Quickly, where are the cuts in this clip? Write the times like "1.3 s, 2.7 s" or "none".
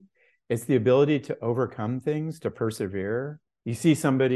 3.4 s